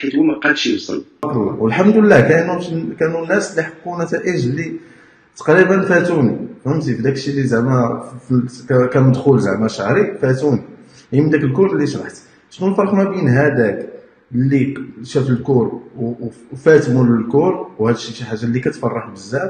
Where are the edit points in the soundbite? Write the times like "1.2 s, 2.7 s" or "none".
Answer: 1.3 s

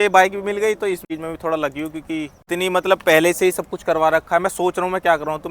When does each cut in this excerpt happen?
1.1 s, 2.4 s

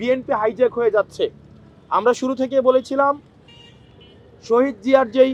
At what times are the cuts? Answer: none

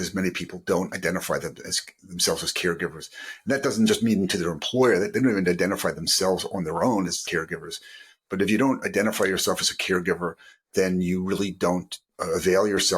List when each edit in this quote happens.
7.2 s

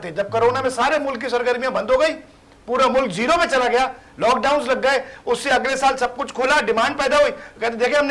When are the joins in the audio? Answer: none

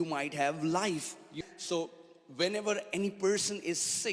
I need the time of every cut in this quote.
1.3 s

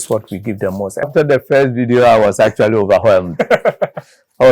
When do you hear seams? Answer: 1.1 s

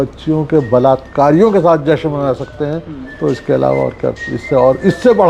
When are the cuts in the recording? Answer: none

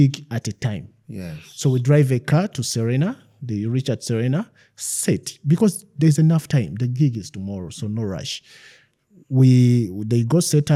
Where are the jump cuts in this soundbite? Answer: none

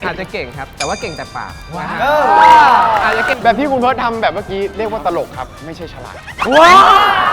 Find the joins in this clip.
3.3 s, 6.3 s

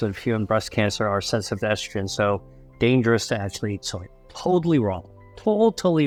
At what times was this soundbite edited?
none

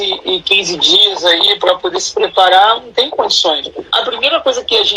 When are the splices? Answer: 3.9 s

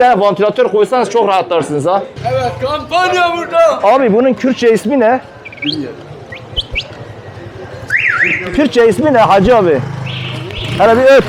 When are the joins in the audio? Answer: 2.1 s

